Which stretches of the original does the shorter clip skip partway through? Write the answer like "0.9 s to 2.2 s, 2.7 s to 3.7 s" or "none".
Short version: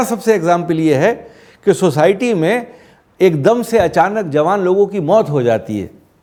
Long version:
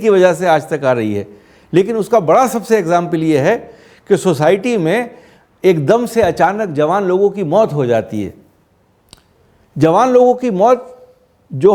none